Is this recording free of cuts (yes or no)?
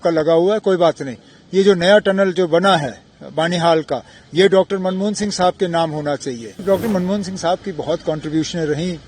no